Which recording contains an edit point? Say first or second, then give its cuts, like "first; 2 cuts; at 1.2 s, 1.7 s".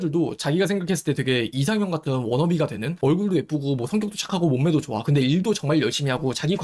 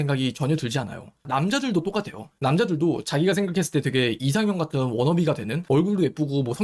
second; 1 cut; at 1.2 s